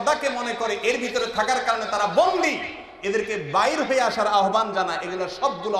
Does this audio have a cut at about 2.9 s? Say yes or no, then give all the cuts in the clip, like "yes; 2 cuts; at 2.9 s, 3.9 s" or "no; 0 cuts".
no; 0 cuts